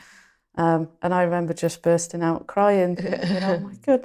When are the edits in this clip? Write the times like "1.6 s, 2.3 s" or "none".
none